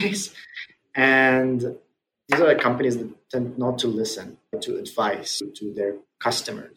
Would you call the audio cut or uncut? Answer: uncut